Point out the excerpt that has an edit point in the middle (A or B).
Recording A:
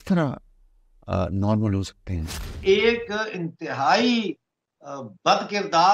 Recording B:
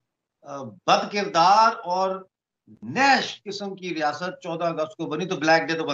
A